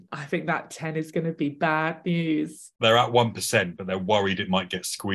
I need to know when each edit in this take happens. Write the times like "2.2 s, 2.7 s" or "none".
2.7 s